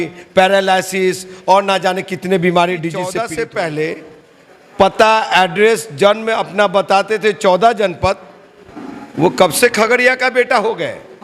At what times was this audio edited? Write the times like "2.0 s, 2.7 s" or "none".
3.1 s